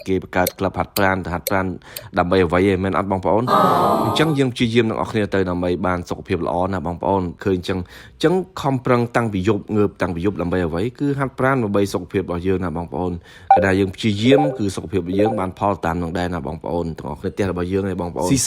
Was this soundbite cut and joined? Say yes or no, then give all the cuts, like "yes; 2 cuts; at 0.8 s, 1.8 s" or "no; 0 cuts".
yes; 2 cuts; at 7.4 s, 17.2 s